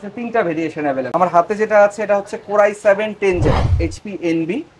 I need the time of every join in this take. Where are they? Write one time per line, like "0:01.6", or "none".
0:03.7